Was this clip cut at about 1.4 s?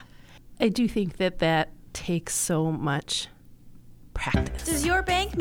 no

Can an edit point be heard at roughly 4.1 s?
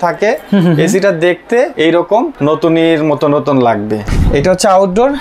yes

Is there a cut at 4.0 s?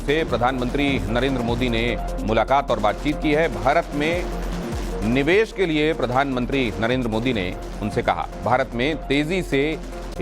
no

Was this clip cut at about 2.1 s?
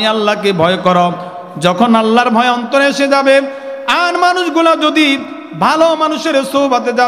no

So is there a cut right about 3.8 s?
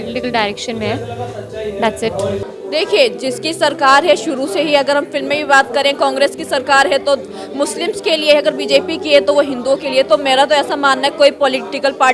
no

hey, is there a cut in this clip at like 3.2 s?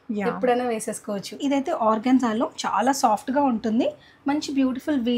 no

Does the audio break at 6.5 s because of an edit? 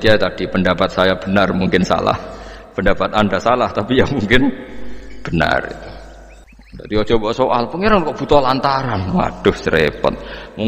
yes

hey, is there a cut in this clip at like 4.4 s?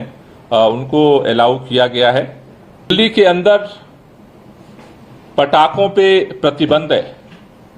no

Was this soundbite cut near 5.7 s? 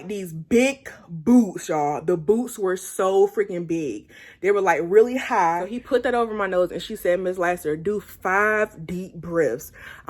yes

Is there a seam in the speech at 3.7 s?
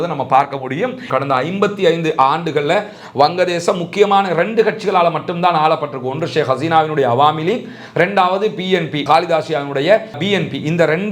no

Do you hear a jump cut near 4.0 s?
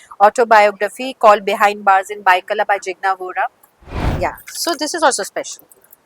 yes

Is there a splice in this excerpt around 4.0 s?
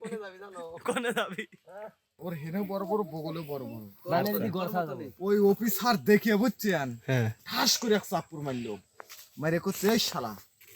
no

